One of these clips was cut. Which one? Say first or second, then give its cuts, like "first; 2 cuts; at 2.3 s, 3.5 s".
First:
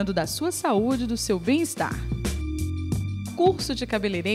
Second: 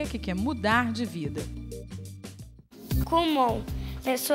second; 1 cut; at 2.8 s